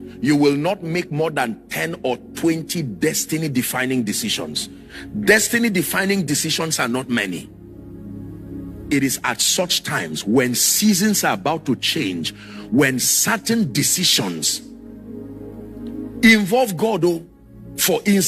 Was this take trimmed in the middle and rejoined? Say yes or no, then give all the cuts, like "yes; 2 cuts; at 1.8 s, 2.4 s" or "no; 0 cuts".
no; 0 cuts